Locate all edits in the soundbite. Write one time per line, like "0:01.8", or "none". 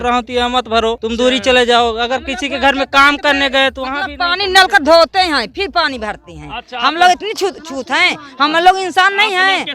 0:01.0